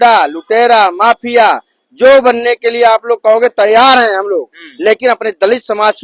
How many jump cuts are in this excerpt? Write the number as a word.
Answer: zero